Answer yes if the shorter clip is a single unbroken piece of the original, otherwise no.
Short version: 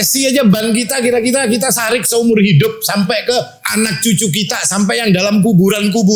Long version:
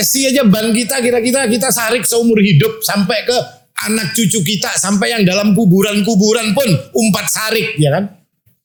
no